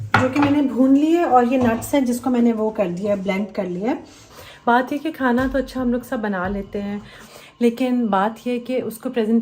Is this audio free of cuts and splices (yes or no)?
no